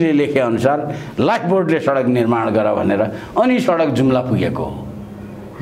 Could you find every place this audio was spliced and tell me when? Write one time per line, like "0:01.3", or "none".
none